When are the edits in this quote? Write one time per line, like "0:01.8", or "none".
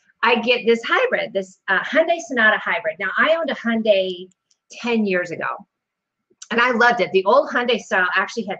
none